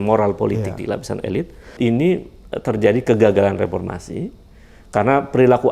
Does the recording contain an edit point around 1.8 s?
yes; 1 cut; at 1.8 s

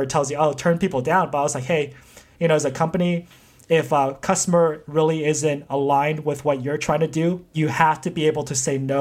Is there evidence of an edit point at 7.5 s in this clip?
yes; 1 cut; at 7.5 s

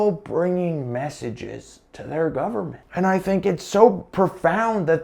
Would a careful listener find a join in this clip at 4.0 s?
yes; 2 cuts; at 2.8 s, 4.0 s

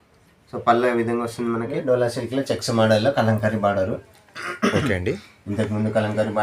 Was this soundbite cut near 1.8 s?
yes; 1 cut; at 1.8 s

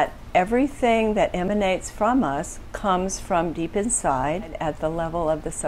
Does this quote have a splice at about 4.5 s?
yes; 1 cut; at 4.5 s

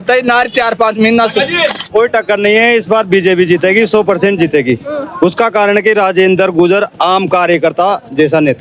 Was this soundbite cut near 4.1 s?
no; 1 cut; at 1.8 s

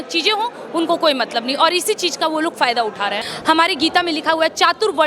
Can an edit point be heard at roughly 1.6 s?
no; 1 cut; at 3.3 s

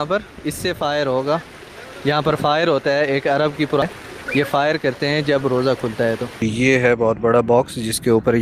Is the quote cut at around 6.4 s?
yes; 2 cuts; at 3.8 s, 6.4 s

